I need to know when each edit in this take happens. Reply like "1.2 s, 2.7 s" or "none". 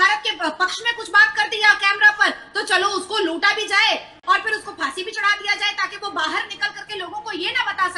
none